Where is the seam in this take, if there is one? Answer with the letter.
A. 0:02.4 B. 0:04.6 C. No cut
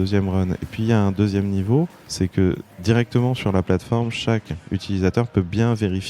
A